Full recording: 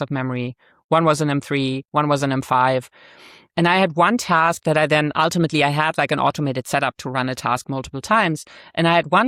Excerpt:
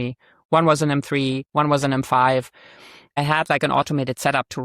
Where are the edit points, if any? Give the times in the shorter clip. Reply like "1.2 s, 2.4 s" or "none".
3.2 s